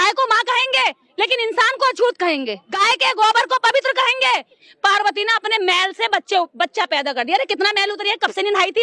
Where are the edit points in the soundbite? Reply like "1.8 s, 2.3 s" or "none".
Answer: 2.8 s, 4.7 s